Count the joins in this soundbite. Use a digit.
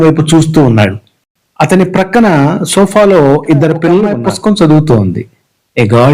1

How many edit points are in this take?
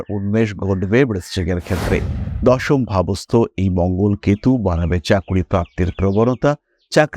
1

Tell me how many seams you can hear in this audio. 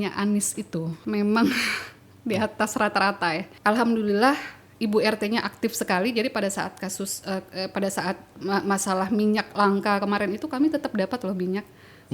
2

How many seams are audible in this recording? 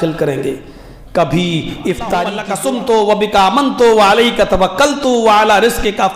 1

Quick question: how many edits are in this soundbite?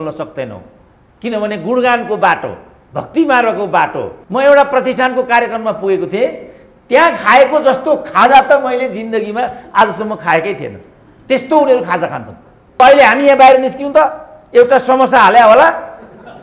2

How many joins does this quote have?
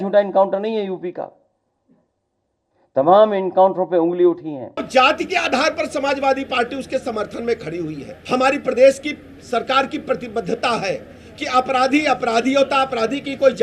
2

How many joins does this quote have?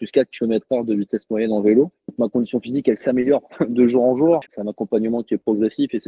2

